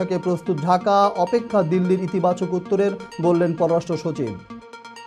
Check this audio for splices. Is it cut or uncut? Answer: uncut